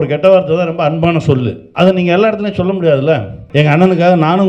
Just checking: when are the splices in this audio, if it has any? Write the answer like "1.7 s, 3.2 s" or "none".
1.6 s, 3.4 s